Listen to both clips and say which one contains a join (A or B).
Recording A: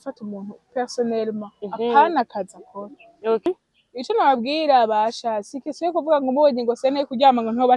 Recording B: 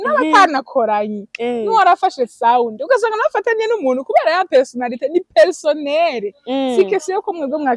A